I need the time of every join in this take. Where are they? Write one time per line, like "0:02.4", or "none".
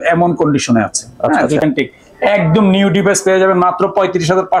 0:01.6